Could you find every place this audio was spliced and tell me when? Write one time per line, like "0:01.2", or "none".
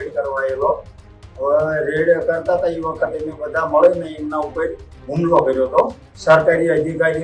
0:06.1